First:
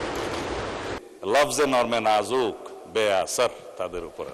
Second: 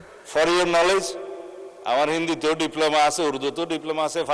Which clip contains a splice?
first; 1 cut; at 1.0 s

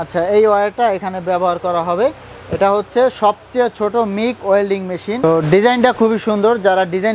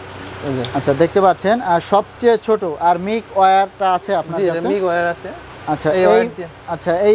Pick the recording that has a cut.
first; 1 cut; at 5.2 s

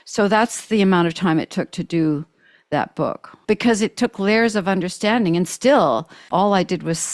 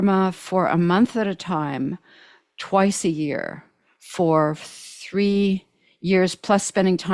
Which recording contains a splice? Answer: first; 2 cuts; at 3.3 s, 6.2 s

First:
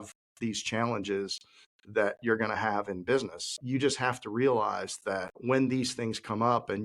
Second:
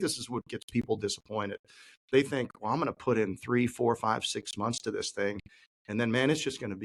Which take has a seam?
first; 2 cuts; at 3.5 s, 5.3 s

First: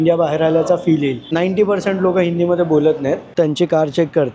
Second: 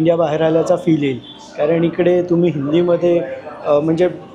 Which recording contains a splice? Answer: first; 2 cuts; at 1.2 s, 3.3 s

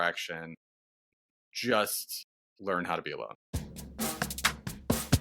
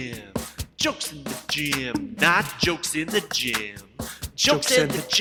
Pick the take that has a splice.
first; 1 cut; at 3.4 s

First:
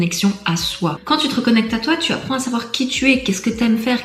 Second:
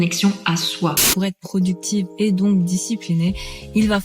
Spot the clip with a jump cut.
second; 1 cut; at 1.1 s

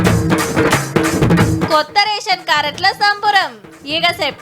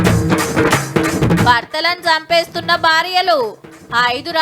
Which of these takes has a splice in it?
first; 1 cut; at 1.1 s

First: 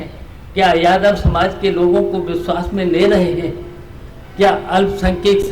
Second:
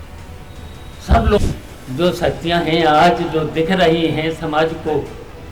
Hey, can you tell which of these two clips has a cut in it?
second; 1 cut; at 1.4 s

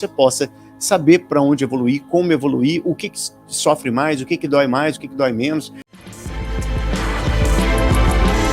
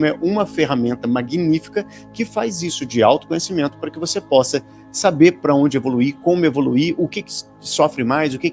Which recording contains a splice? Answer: first; 1 cut; at 5.8 s

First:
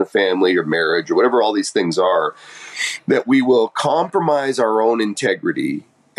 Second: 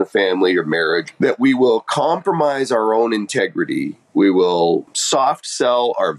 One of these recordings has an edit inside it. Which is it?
second; 3 cuts; at 1.0 s, 4.0 s, 4.9 s

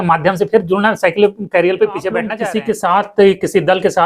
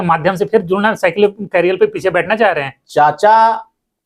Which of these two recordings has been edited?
first; 1 cut; at 2.3 s

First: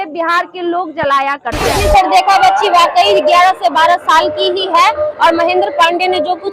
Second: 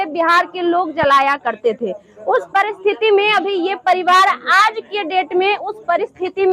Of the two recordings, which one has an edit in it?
first; 1 cut; at 1.8 s

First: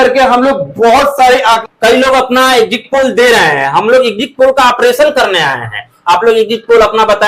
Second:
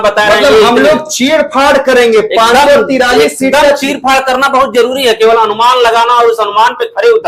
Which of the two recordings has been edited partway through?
first; 1 cut; at 1.6 s

